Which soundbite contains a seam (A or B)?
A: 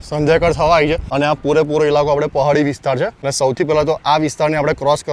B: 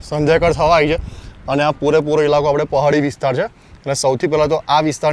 A